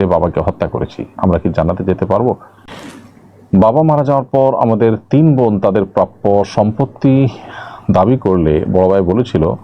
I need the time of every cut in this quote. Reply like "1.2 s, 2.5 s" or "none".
3.0 s